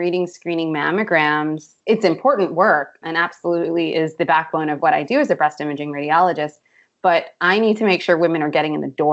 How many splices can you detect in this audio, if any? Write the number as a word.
zero